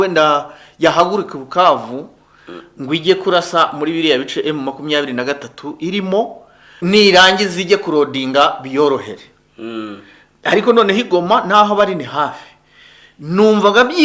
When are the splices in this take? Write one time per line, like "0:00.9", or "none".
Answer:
0:06.8